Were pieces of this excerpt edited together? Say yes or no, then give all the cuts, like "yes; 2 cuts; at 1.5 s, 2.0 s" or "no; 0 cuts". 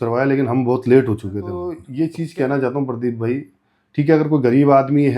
yes; 1 cut; at 1.8 s